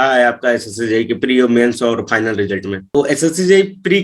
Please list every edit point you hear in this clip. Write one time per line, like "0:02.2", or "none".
0:02.8